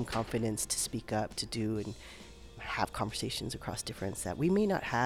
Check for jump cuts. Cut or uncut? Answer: cut